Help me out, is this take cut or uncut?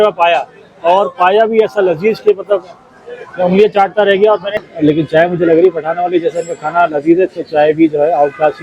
cut